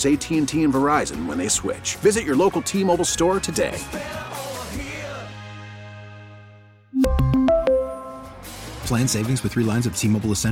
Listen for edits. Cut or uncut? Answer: uncut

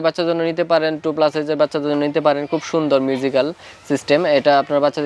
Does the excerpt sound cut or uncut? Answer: uncut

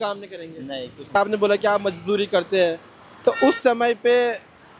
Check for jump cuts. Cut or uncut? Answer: cut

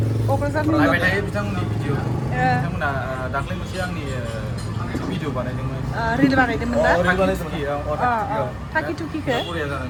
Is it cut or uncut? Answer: uncut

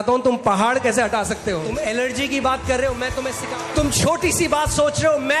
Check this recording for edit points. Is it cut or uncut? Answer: cut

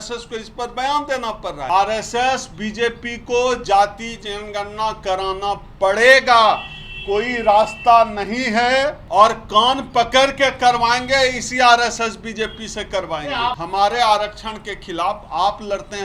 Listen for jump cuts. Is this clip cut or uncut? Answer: cut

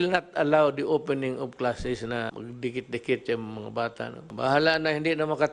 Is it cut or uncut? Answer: cut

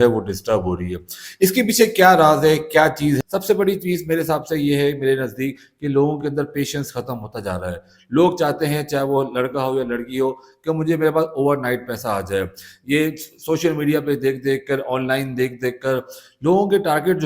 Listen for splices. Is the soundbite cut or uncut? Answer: cut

